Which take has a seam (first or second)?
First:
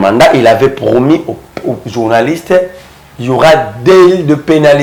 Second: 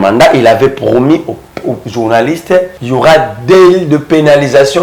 second